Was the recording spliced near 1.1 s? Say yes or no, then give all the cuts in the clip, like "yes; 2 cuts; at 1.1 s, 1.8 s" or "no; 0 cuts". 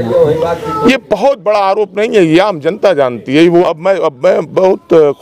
no; 1 cut; at 3.7 s